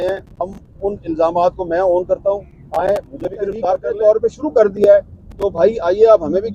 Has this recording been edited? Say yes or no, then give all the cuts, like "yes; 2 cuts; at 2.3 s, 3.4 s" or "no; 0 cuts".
yes; 1 cut; at 3.9 s